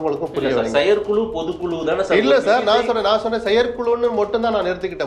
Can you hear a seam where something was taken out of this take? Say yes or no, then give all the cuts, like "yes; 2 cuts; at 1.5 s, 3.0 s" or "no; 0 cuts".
no; 0 cuts